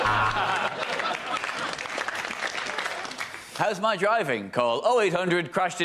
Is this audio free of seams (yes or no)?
no